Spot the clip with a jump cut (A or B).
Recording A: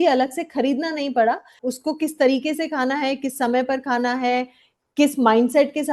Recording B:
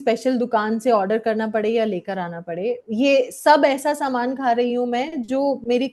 A